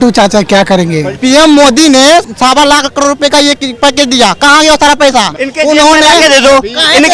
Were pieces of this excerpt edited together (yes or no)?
yes